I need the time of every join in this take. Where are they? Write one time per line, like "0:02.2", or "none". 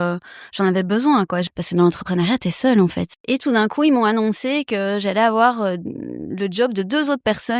0:01.5
0:03.1